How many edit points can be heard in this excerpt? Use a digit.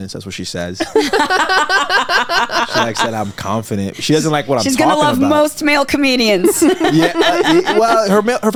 0